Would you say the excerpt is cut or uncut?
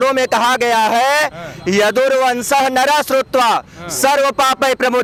uncut